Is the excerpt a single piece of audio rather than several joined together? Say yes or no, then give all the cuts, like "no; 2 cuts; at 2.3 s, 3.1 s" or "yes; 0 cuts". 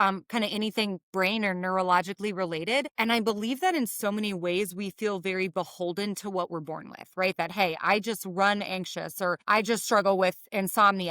no; 2 cuts; at 2.9 s, 9.4 s